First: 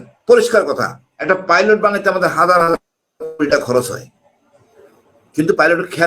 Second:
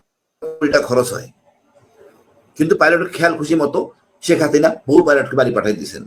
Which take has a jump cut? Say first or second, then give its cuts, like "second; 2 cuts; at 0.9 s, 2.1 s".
first; 1 cut; at 1.1 s